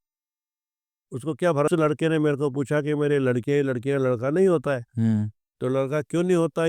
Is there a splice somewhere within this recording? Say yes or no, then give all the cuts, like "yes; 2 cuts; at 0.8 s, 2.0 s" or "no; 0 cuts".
yes; 1 cut; at 1.7 s